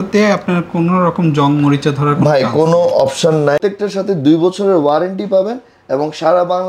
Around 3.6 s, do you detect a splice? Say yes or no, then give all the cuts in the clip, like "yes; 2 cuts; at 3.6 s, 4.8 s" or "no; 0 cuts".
yes; 1 cut; at 3.6 s